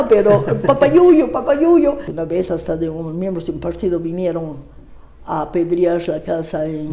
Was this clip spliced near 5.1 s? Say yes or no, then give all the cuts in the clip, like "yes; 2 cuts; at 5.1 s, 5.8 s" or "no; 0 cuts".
no; 1 cut; at 2.1 s